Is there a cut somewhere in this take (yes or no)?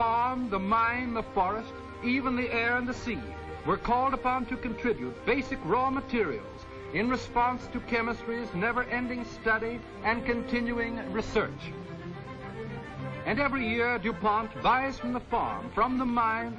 yes